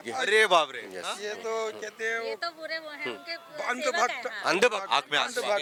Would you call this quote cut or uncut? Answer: uncut